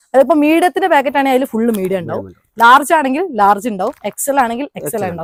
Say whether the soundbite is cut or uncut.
uncut